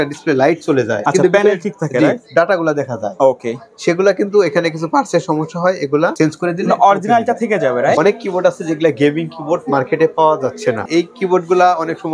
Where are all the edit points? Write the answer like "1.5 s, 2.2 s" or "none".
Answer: 1.0 s, 6.1 s, 8.0 s, 10.8 s

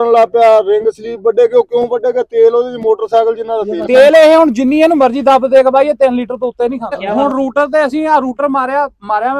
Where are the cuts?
3.7 s, 7.0 s

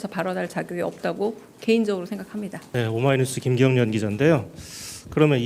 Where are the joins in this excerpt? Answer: 2.6 s

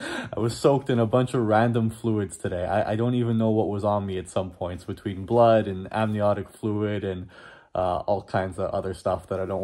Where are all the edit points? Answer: none

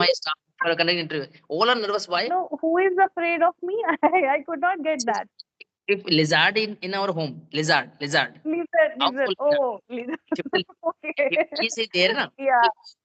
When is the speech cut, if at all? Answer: 2.3 s

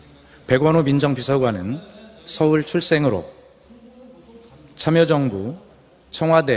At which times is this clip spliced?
none

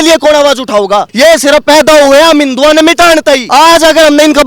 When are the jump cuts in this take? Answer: 3.4 s

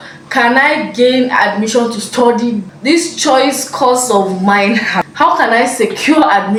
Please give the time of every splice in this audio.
none

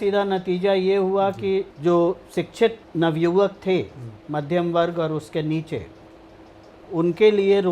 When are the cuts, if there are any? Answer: 1.7 s, 2.8 s

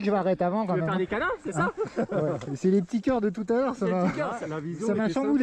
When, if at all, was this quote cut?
none

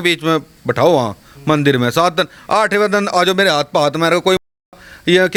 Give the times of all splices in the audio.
none

